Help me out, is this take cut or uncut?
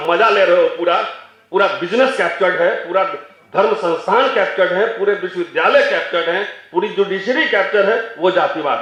uncut